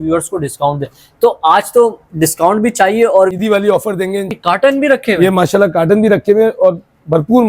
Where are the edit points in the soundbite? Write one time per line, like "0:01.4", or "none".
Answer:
0:03.3
0:04.3